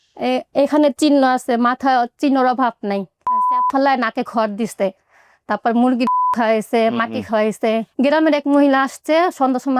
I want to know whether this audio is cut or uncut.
cut